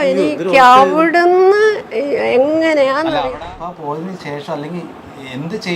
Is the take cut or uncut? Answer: cut